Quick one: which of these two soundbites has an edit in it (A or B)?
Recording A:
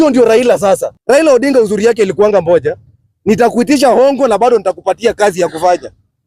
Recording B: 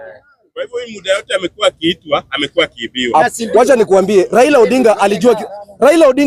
A